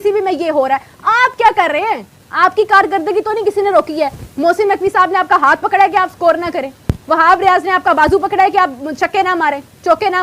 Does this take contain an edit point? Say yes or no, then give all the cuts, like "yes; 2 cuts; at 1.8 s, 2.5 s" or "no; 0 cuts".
no; 0 cuts